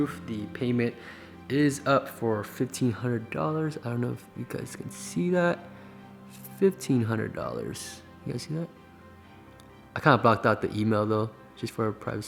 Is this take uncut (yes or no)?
yes